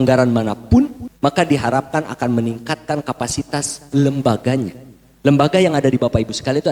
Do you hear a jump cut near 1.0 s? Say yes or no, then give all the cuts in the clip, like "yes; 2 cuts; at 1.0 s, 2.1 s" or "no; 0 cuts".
yes; 1 cut; at 1.0 s